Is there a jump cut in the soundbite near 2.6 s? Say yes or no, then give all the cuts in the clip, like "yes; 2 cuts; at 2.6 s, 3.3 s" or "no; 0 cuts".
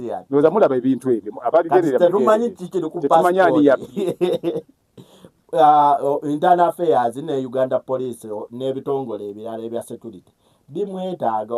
no; 1 cut; at 8.3 s